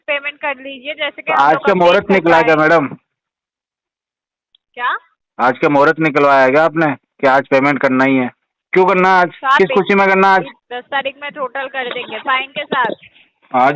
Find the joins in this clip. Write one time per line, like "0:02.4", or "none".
0:10.6